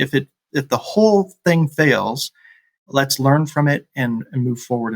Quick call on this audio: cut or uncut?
uncut